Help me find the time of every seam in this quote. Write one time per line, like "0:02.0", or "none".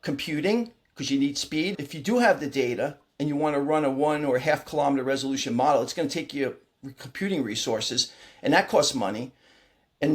0:01.8